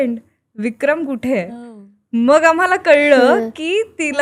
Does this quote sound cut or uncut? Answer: uncut